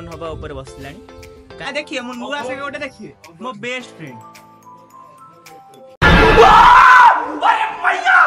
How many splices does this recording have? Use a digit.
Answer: 1